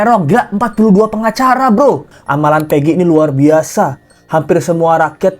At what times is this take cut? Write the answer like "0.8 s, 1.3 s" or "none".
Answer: 2.1 s